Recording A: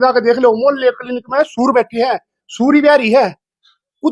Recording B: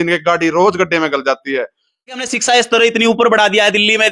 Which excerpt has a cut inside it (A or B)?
B